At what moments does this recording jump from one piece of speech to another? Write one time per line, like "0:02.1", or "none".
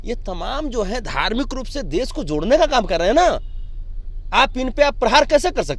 none